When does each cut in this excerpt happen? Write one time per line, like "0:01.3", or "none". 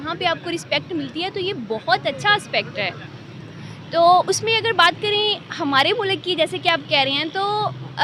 none